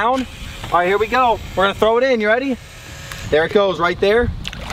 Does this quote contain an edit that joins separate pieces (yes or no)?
no